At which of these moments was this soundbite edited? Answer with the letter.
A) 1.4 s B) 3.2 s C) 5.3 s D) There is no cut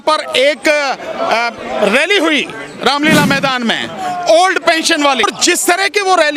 C